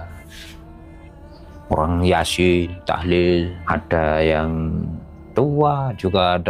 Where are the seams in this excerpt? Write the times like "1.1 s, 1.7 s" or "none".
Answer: 3.6 s